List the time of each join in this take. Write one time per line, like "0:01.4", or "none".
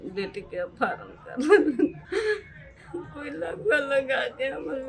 0:02.0